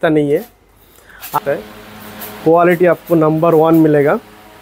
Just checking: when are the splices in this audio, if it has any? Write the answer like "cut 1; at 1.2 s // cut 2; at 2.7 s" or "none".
cut 1; at 1.3 s